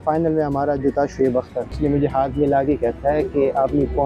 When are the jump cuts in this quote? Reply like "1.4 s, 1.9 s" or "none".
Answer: 1.8 s